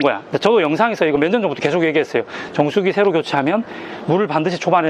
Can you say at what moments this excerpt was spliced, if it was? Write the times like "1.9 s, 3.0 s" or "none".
none